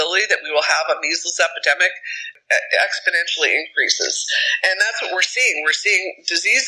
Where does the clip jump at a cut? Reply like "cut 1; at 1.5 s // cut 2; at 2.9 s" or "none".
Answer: cut 1; at 2.3 s